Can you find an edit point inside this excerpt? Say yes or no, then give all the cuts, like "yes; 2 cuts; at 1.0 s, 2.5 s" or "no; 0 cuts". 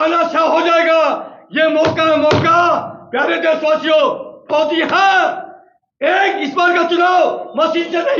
no; 0 cuts